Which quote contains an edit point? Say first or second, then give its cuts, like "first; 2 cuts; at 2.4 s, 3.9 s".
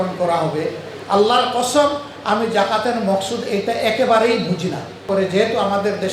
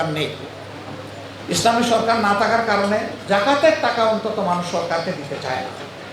first; 1 cut; at 5.1 s